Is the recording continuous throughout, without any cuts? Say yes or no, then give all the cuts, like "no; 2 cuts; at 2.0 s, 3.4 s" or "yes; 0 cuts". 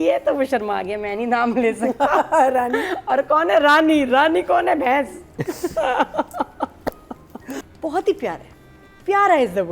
no; 1 cut; at 7.7 s